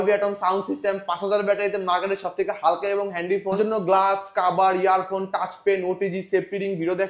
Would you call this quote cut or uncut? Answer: cut